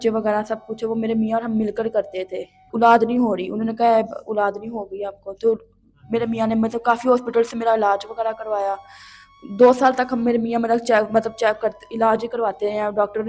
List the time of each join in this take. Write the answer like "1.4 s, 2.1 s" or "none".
2.6 s